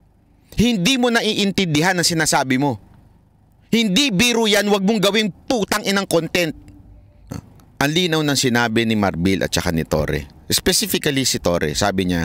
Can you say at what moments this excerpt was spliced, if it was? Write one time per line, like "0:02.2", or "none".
0:07.3